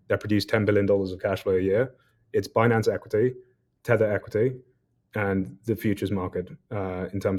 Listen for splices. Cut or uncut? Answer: uncut